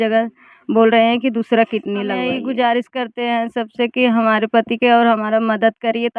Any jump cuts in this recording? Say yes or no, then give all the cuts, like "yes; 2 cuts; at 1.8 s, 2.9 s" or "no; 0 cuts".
yes; 1 cut; at 2.3 s